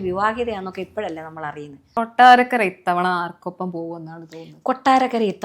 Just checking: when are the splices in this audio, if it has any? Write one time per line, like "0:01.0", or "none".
0:01.7